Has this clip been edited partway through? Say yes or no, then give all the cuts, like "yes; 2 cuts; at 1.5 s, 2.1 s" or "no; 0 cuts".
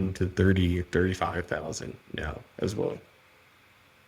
no; 0 cuts